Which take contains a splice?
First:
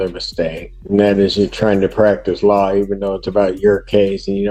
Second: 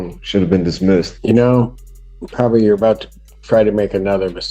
second; 1 cut; at 1.1 s

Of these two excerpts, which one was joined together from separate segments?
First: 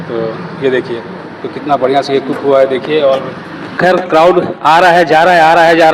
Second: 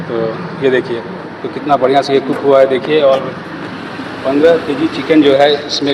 first; 1 cut; at 3.8 s

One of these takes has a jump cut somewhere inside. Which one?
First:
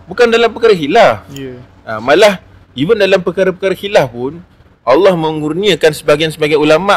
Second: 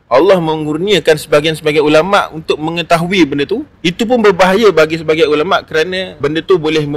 second; 2 cuts; at 3.7 s, 6.1 s

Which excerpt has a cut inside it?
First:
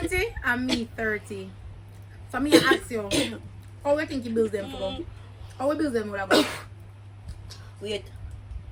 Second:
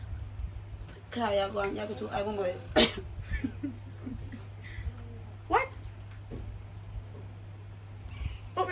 second; 1 cut; at 7.0 s

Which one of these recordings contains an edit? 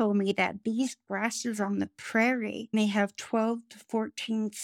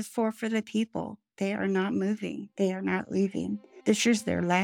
second; 2 cuts; at 2.4 s, 3.7 s

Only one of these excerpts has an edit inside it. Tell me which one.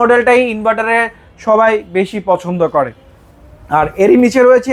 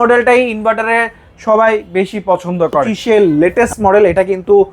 second; 1 cut; at 2.9 s

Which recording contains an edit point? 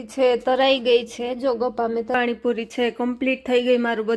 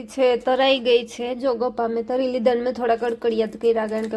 first; 1 cut; at 2.1 s

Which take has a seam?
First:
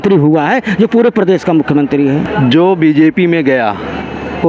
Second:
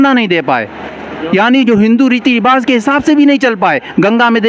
first; 1 cut; at 2.3 s

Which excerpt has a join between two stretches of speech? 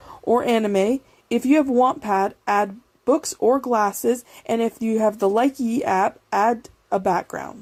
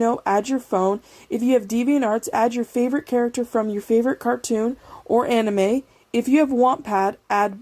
second; 1 cut; at 1.1 s

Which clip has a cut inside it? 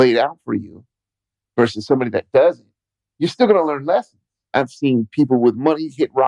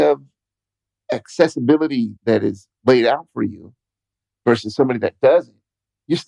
first; 1 cut; at 4.4 s

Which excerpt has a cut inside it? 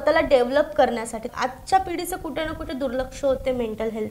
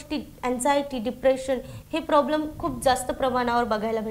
first; 1 cut; at 1.3 s

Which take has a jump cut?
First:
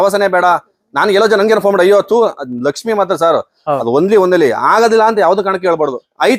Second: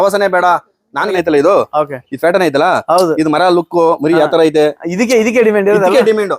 second; 1 cut; at 1.1 s

